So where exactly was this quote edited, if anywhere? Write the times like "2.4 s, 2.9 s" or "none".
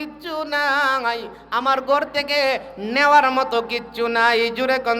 none